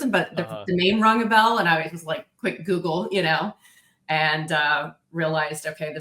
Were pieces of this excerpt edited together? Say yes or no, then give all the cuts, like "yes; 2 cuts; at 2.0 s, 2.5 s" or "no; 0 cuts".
no; 0 cuts